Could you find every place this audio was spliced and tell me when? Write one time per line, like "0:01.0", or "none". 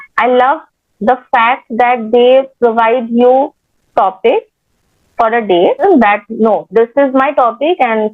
0:05.8